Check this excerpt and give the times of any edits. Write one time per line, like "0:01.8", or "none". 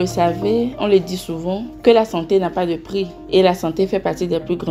none